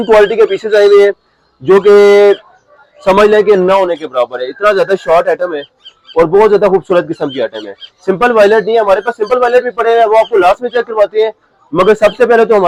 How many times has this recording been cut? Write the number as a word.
zero